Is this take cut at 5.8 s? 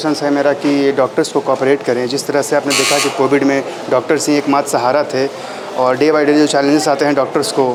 no; 0 cuts

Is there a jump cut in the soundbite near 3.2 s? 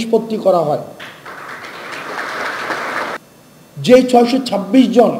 yes; 1 cut; at 3.2 s

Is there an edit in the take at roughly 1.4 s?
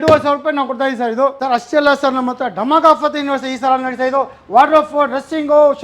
yes; 1 cut; at 1.4 s

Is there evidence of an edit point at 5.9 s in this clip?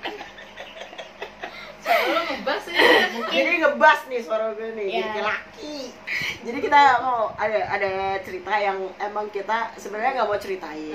yes; 1 cut; at 5.9 s

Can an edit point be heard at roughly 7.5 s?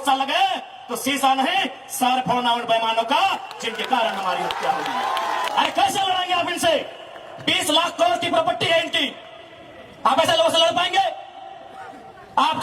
no; 1 cut; at 5.5 s

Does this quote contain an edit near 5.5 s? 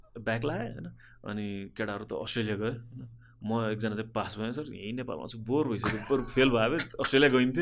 no; 0 cuts

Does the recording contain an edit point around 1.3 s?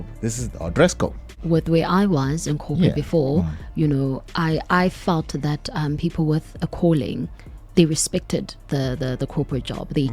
yes; 1 cut; at 1.3 s

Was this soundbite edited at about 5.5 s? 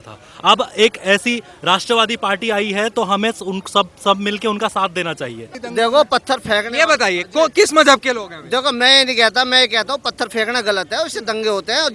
yes; 1 cut; at 5.5 s

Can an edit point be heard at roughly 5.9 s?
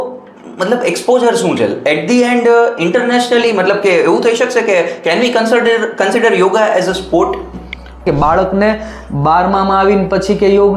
no; 1 cut; at 8.0 s

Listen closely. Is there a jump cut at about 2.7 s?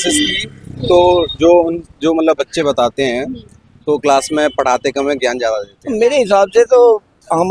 no; 1 cut; at 5.8 s

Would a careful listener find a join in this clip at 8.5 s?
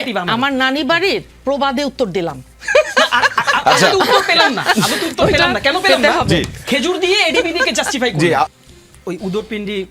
no; 0 cuts

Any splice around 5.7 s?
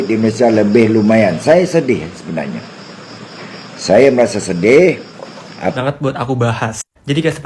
yes; 1 cut; at 5.7 s

